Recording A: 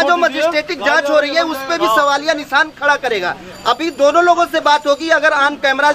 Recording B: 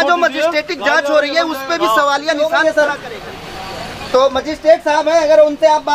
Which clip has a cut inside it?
B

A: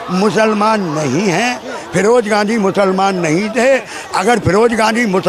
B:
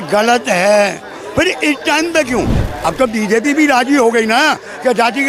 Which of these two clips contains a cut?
B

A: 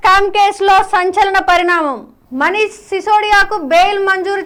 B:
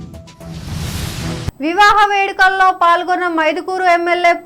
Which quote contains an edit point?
B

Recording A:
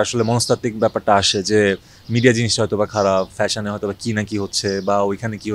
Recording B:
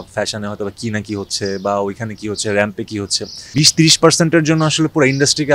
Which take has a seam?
B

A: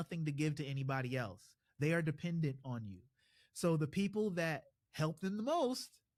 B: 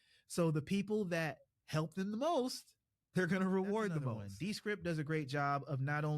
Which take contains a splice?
B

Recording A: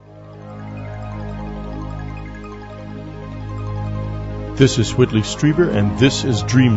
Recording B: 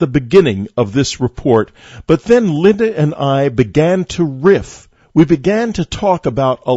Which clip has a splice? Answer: B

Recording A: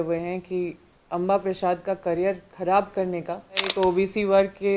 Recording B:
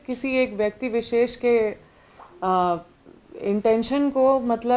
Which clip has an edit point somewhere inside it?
A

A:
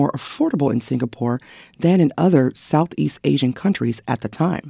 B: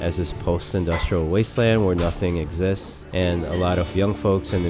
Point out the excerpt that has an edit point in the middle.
B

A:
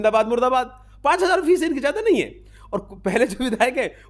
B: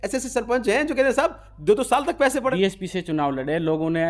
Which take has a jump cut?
B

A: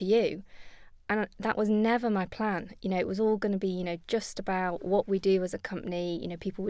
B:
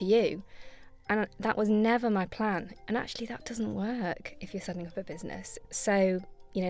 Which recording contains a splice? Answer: B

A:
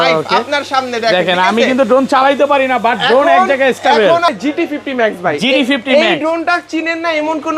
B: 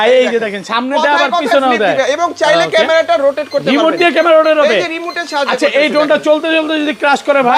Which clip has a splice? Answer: A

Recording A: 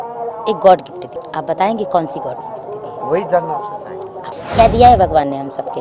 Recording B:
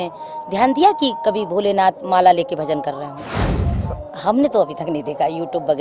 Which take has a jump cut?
A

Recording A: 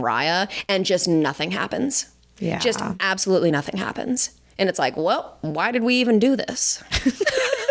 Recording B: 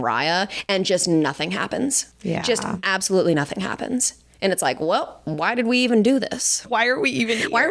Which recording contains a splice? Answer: B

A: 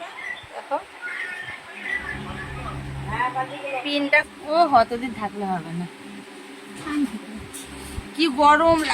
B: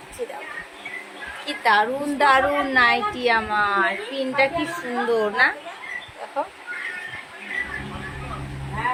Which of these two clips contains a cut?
A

